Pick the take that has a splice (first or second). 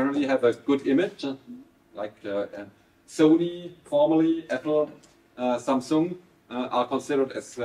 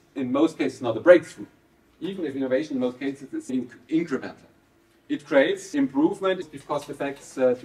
second